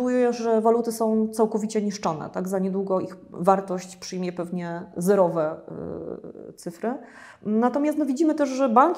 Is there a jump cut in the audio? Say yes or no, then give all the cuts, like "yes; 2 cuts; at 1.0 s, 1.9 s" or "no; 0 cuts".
no; 0 cuts